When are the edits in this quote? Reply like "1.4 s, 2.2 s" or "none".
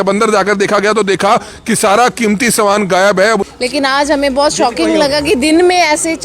3.5 s